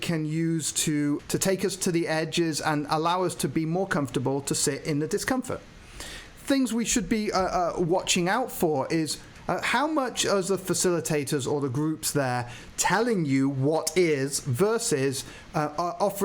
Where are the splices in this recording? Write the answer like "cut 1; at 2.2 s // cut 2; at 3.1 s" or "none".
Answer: cut 1; at 1.2 s // cut 2; at 9.3 s